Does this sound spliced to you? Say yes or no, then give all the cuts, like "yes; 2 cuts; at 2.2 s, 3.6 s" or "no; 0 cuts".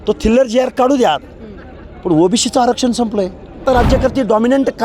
yes; 1 cut; at 3.6 s